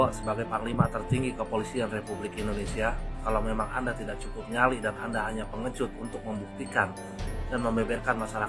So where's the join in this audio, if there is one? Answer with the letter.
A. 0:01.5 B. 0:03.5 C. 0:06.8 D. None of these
D